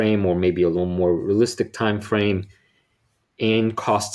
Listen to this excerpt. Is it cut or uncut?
uncut